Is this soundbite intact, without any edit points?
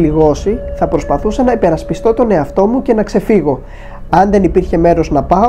yes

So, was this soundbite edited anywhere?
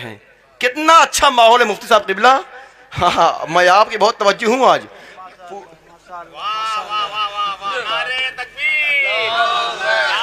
no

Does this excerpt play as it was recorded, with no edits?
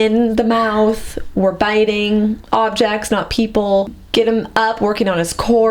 no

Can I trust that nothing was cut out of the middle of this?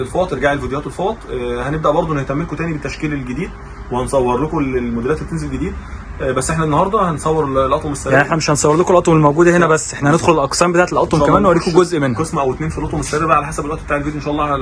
yes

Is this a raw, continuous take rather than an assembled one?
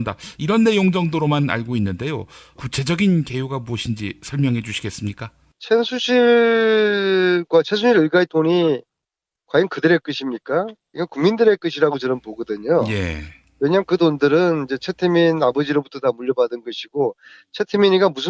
yes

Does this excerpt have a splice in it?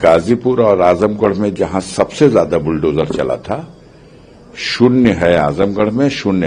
no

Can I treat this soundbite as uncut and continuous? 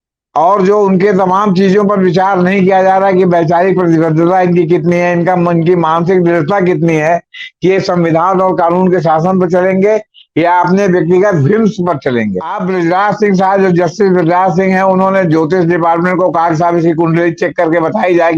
no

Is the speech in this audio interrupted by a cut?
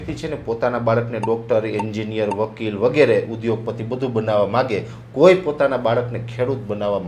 no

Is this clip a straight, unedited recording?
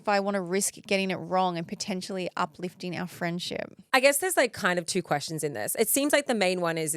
no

